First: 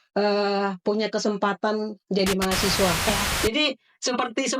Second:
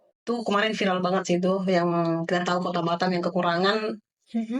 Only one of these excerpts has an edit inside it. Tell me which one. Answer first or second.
first